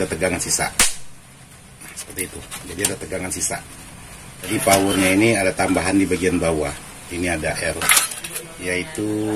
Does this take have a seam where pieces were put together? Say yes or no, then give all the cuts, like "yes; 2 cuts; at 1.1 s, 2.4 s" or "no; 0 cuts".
yes; 1 cut; at 4.5 s